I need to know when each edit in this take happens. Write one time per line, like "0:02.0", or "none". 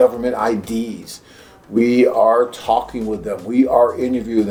none